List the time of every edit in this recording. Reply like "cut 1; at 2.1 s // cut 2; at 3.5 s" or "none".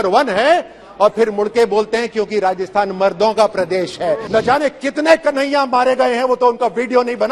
cut 1; at 4.2 s